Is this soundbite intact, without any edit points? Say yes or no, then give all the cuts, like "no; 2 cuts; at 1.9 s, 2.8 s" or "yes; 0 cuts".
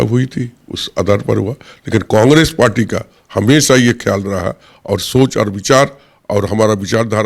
yes; 0 cuts